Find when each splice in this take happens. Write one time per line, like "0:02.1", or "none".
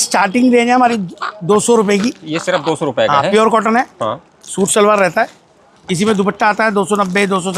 none